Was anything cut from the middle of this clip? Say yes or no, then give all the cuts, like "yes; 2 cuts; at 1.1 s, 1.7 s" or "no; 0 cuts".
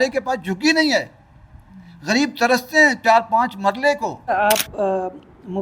yes; 1 cut; at 4.3 s